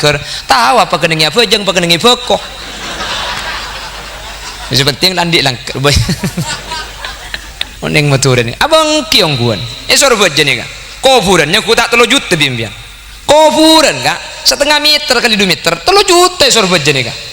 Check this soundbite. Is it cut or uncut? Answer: cut